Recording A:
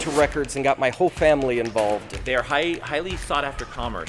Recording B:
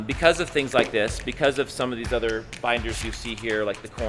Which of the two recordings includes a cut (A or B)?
A